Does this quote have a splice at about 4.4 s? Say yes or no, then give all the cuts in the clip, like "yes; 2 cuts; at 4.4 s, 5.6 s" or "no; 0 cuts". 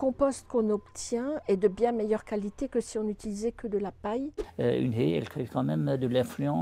yes; 1 cut; at 4.4 s